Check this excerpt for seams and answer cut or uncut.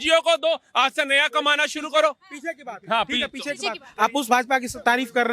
uncut